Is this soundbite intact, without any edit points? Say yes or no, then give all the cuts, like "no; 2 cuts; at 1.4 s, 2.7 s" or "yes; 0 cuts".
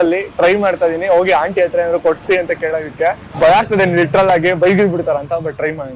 no; 1 cut; at 3.3 s